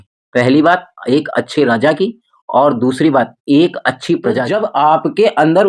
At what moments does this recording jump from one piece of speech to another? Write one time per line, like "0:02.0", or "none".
0:04.5